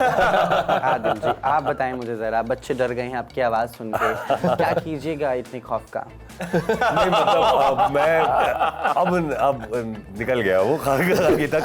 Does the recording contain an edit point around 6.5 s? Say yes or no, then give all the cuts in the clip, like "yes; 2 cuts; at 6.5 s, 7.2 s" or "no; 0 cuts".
no; 0 cuts